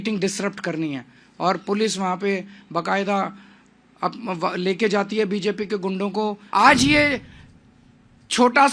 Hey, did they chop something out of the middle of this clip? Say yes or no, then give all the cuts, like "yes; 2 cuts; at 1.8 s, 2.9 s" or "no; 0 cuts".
yes; 1 cut; at 6.4 s